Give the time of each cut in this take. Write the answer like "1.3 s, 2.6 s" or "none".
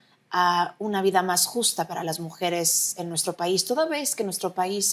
none